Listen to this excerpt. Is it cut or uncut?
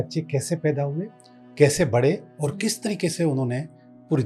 uncut